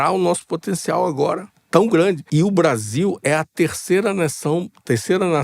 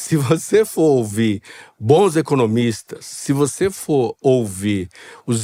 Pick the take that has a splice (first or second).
first